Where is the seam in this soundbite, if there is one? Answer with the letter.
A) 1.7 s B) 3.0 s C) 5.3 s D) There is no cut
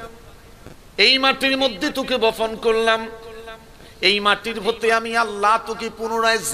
D